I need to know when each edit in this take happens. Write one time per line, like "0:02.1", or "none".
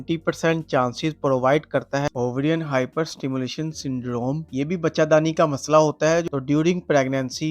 0:02.1
0:06.3

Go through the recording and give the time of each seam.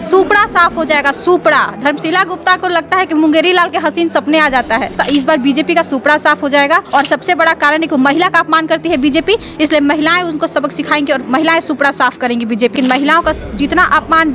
0:05.0
0:06.8
0:12.7

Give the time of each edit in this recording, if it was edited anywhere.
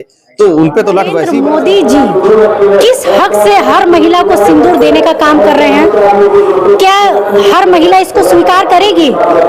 0:01.2

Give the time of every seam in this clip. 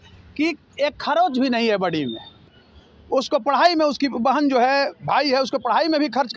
0:02.5

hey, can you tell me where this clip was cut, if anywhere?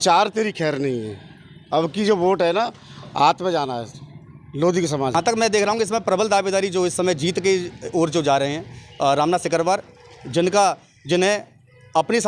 0:05.1

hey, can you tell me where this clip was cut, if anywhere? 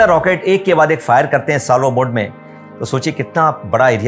0:02.5

